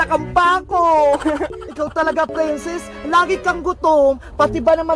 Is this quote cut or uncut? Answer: cut